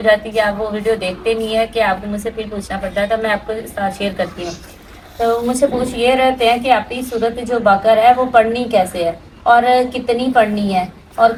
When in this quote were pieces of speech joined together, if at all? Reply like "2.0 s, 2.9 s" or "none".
none